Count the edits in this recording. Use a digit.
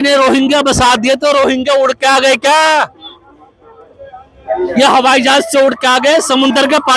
0